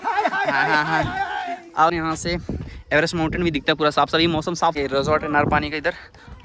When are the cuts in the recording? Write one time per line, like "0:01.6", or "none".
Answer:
0:01.9
0:04.7